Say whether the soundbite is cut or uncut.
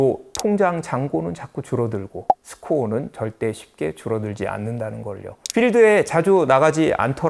uncut